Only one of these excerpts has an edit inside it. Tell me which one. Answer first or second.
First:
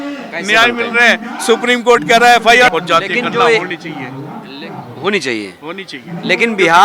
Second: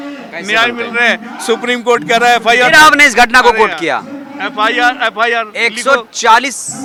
first